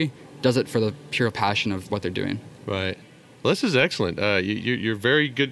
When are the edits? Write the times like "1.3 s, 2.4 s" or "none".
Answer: none